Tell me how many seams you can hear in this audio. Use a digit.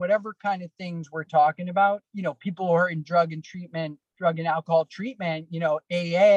1